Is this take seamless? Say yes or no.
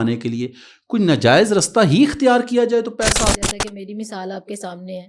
no